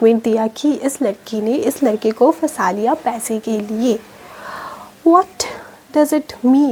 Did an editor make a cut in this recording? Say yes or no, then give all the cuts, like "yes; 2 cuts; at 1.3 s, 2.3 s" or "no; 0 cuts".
no; 0 cuts